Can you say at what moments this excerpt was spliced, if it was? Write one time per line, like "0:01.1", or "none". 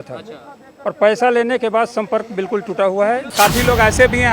0:03.3